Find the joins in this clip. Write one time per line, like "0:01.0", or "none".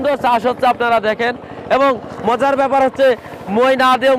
none